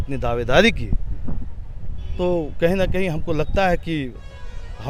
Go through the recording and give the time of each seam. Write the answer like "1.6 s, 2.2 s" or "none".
none